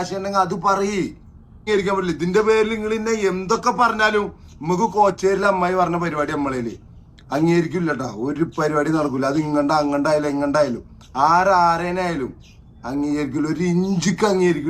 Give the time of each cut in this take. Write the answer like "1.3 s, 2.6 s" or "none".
1.6 s